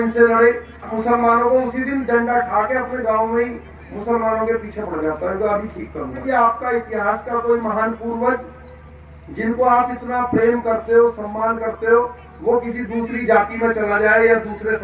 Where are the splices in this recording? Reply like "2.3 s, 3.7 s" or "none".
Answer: 0.9 s, 6.2 s